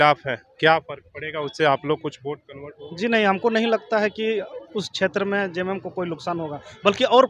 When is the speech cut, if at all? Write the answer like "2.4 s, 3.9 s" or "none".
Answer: none

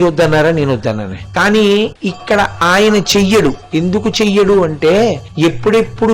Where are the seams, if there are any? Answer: 1.2 s, 2.1 s, 3.6 s, 5.3 s

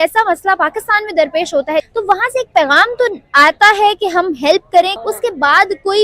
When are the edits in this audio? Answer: 1.9 s, 4.9 s

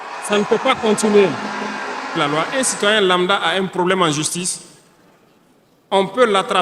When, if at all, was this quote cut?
2.2 s

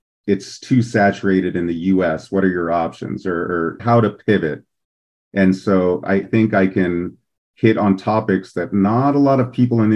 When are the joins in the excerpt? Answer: 3.8 s, 6.2 s

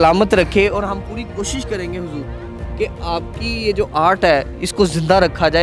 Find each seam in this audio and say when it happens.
none

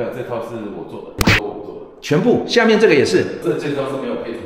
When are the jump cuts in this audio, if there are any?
1.2 s, 3.4 s

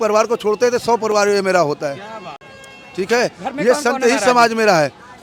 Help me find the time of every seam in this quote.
none

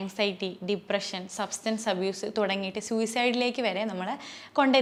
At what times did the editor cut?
none

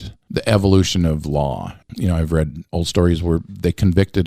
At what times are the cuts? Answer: 1.8 s, 2.6 s

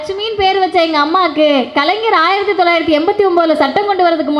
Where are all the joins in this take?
none

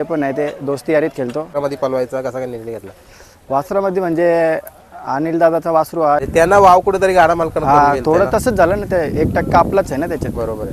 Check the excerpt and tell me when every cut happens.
1.5 s, 6.2 s

